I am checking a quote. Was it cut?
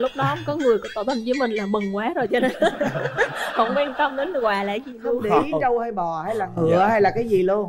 no; 0 cuts

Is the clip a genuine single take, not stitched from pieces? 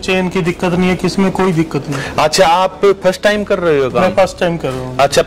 yes; 0 cuts

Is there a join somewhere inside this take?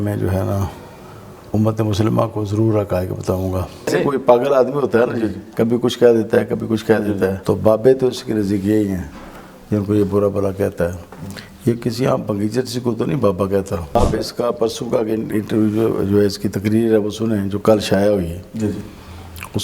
yes; 3 cuts; at 3.9 s, 7.4 s, 14.0 s

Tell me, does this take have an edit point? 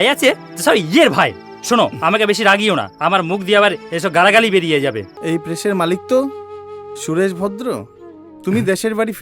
yes; 1 cut; at 5.1 s

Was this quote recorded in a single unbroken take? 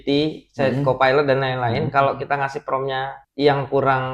no; 1 cut; at 3.2 s

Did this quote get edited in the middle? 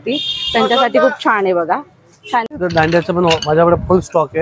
yes; 1 cut; at 2.5 s

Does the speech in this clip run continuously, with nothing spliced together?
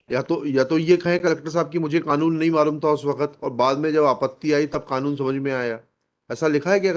yes; 0 cuts

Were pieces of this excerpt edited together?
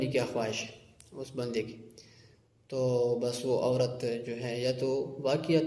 no; 0 cuts

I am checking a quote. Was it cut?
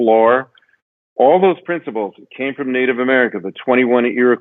no; 0 cuts

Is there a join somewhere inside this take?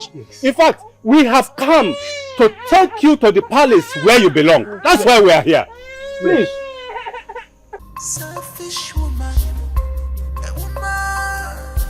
yes; 1 cut; at 7.8 s

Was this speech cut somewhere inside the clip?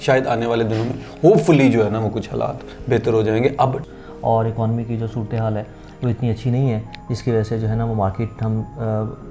yes; 1 cut; at 3.8 s

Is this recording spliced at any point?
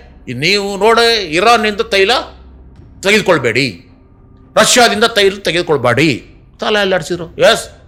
no; 0 cuts

